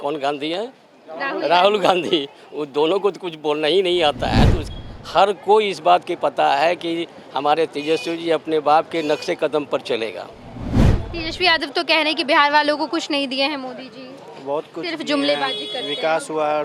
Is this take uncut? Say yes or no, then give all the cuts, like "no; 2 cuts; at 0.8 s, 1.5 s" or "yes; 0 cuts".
no; 2 cuts; at 4.7 s, 10.9 s